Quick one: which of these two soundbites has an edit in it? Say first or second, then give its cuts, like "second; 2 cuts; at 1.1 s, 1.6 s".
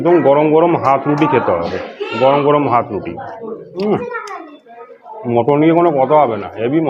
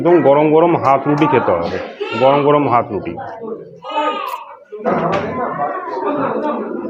first; 1 cut; at 3.8 s